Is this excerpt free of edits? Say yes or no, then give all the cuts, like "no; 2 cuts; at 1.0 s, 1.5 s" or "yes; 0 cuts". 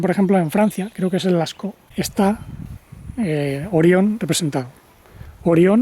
yes; 0 cuts